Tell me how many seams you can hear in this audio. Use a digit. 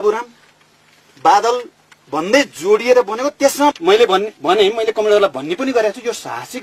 1